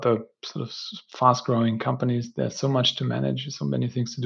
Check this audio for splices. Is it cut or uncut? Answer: uncut